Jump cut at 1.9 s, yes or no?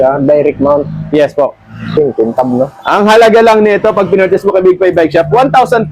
yes